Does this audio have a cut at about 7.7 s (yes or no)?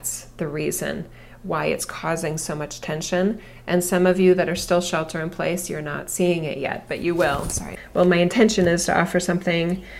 yes